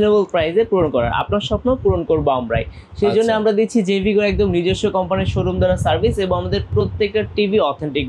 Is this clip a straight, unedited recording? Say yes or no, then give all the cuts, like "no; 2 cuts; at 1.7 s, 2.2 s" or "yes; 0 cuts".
yes; 0 cuts